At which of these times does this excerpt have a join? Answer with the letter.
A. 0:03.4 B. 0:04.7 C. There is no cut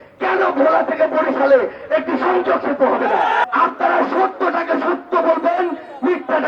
A